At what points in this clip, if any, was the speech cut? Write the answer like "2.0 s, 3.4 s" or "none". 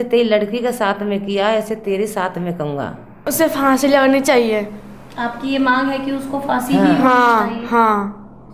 3.1 s